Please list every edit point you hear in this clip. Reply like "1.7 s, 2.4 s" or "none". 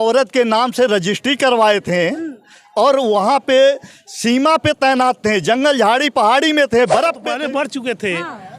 7.2 s

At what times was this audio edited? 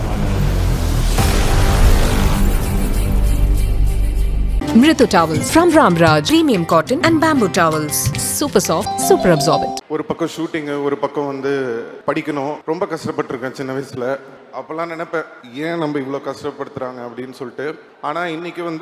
9.8 s, 11.9 s, 12.6 s, 14.4 s, 15.4 s, 17.9 s

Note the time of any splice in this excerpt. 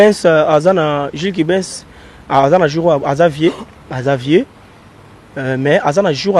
none

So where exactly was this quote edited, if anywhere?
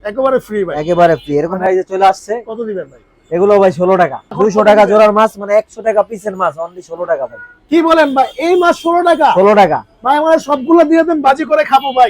1.6 s, 4.3 s

